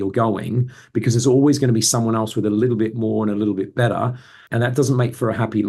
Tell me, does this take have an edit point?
yes; 1 cut; at 4.4 s

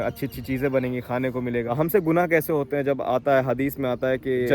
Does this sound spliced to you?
yes; 1 cut; at 1.7 s

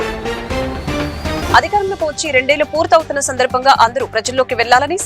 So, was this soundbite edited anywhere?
yes; 1 cut; at 1.5 s

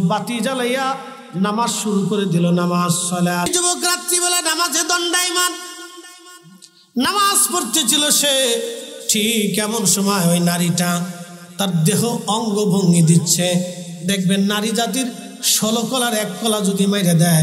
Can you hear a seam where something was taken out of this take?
yes; 1 cut; at 3.4 s

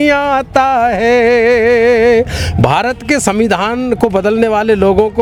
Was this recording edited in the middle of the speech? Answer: no; 0 cuts

